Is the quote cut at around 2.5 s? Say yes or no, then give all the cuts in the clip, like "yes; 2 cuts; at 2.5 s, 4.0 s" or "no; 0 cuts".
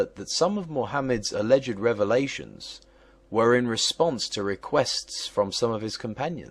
no; 1 cut; at 5.5 s